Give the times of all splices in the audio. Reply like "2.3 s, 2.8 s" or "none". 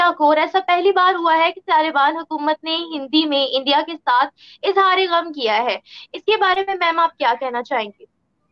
none